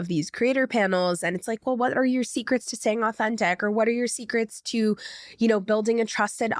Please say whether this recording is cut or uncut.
uncut